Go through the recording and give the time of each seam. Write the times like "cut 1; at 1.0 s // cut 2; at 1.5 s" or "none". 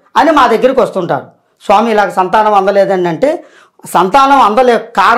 none